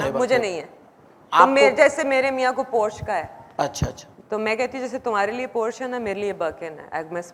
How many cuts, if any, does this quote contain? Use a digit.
0